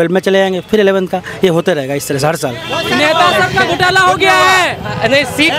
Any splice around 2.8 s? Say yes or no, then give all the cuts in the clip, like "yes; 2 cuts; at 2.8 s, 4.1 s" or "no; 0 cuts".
yes; 1 cut; at 2.8 s